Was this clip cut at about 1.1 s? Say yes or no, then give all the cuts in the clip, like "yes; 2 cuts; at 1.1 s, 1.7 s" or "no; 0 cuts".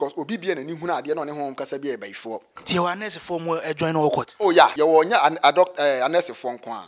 no; 2 cuts; at 2.5 s, 4.7 s